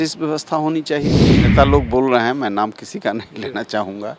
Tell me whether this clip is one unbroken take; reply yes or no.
no